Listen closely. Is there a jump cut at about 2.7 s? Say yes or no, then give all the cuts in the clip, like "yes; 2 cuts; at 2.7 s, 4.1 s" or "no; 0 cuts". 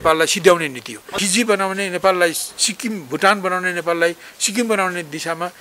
no; 1 cut; at 1.1 s